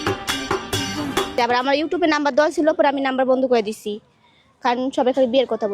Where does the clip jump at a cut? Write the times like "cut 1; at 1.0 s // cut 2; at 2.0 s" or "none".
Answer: cut 1; at 1.3 s

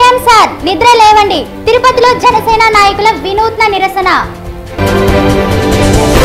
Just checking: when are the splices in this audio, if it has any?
none

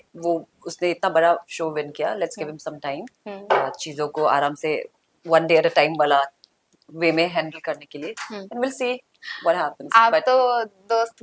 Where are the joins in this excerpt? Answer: none

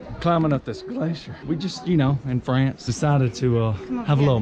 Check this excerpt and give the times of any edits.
cut 1; at 1.3 s // cut 2; at 2.9 s

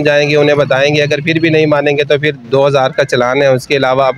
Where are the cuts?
none

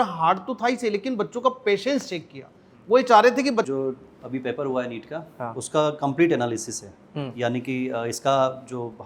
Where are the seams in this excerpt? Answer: cut 1; at 3.7 s

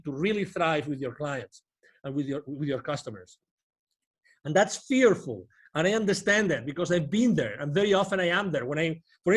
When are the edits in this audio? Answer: none

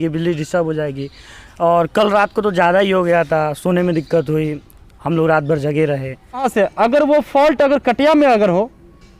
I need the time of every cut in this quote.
cut 1; at 6.4 s

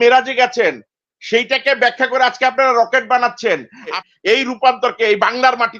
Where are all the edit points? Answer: cut 1; at 4.0 s

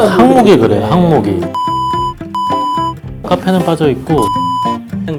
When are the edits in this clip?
none

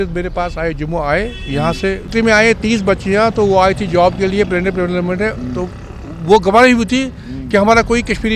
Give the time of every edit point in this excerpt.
cut 1; at 2.1 s

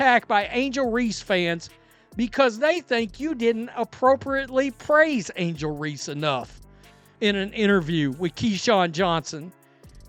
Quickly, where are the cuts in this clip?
none

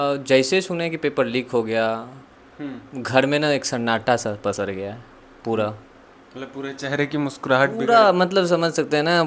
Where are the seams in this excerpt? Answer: none

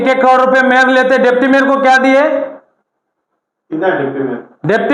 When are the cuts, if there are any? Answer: none

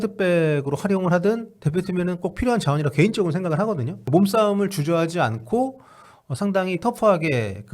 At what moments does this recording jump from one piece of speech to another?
cut 1; at 3.9 s

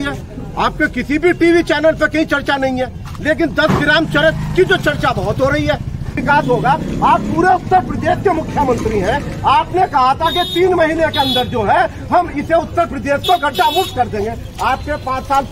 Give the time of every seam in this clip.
cut 1; at 6.2 s

